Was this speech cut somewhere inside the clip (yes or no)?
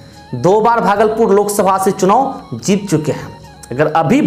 no